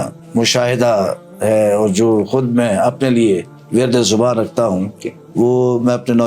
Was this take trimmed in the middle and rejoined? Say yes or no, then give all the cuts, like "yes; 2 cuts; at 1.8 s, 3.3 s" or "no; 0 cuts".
no; 0 cuts